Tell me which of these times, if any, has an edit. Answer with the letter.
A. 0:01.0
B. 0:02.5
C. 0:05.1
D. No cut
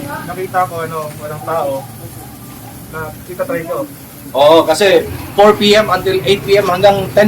C